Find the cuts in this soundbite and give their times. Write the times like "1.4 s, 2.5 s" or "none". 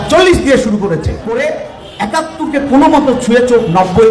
1.4 s